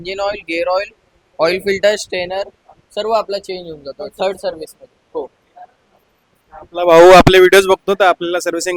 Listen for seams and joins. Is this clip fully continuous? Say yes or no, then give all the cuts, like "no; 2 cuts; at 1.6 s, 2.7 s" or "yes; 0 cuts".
yes; 0 cuts